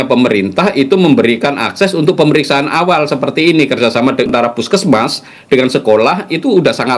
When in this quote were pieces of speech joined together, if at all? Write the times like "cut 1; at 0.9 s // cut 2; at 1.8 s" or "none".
cut 1; at 4.3 s